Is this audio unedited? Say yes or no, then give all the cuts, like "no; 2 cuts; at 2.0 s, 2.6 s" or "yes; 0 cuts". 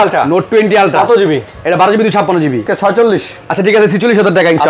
no; 1 cut; at 2.6 s